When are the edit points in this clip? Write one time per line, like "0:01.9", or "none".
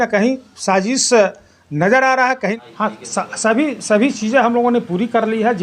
0:02.5